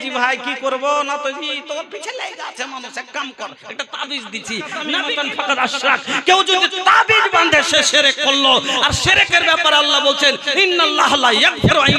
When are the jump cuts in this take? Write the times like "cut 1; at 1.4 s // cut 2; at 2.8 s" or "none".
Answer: cut 1; at 5.0 s